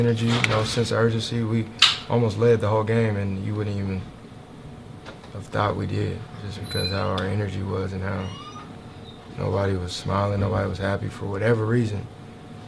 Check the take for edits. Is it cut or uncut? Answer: uncut